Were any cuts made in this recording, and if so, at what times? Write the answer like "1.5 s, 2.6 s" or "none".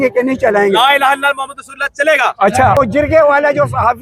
2.8 s